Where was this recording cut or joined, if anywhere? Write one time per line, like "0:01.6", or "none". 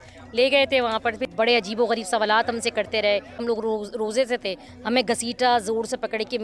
0:01.3
0:03.4

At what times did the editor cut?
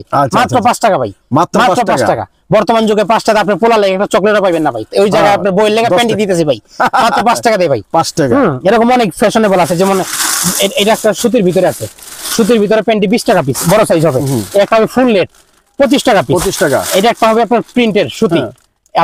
none

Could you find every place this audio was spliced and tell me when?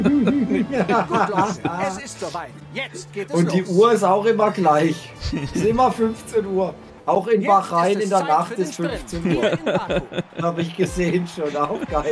none

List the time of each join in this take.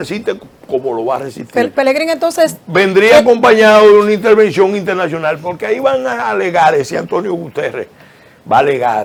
none

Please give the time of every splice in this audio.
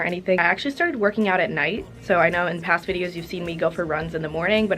none

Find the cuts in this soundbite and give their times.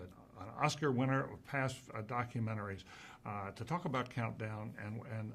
none

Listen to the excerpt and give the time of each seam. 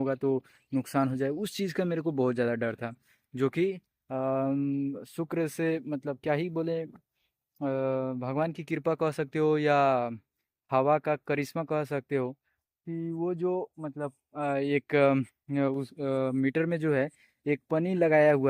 none

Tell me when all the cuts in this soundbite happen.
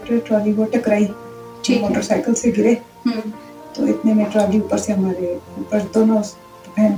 none

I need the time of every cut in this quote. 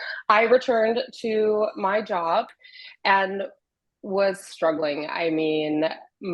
0:02.5

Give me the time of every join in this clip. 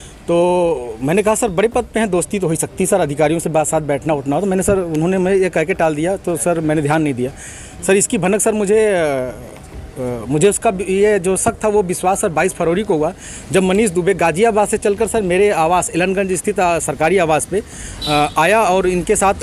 none

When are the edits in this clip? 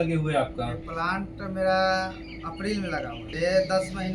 0:03.2

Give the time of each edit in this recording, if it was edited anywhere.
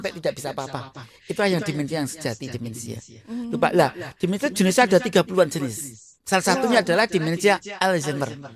none

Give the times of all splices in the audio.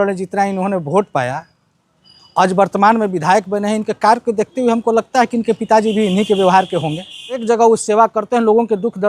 0:07.4

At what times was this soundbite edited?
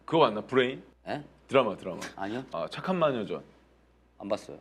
0:00.9
0:02.5

